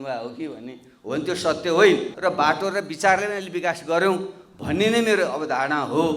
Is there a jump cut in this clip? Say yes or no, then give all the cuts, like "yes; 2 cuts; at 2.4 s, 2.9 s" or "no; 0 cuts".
yes; 1 cut; at 2.1 s